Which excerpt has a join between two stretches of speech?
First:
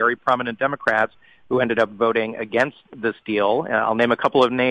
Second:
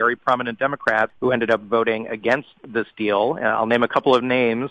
second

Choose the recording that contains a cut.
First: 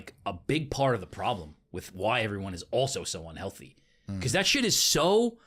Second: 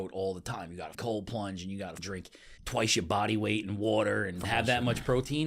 second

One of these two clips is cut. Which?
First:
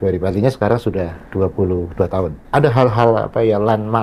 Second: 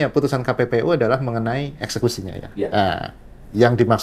first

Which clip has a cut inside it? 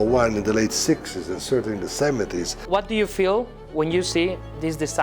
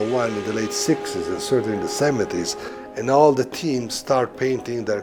first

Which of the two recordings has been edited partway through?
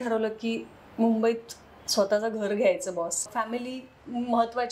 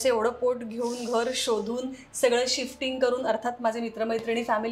first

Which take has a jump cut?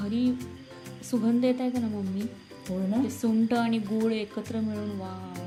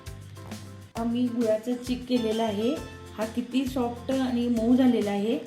second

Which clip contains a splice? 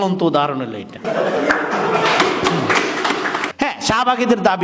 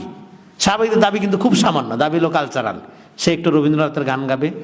first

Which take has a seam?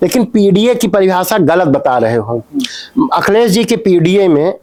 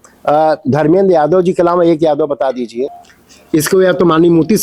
second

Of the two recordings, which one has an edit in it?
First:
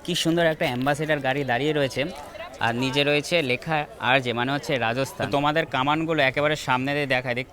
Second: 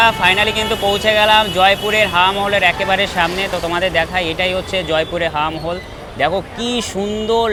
first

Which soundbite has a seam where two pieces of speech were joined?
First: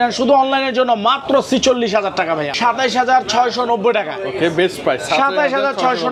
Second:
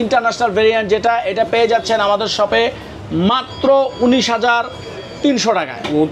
first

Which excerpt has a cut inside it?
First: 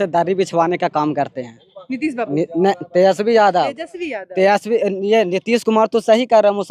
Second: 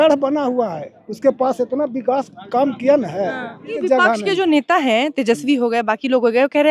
second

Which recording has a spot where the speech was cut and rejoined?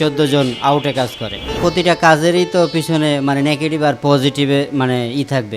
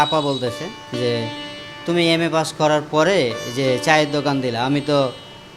first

